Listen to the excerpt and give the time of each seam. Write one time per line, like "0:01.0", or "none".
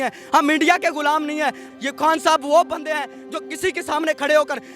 0:01.7